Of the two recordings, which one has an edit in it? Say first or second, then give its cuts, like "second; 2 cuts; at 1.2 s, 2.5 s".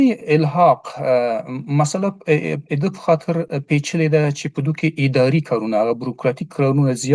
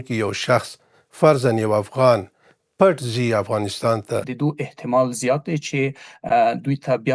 second; 1 cut; at 4.3 s